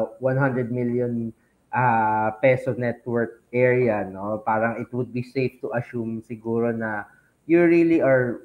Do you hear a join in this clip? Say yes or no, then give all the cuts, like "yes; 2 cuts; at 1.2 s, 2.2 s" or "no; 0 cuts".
no; 0 cuts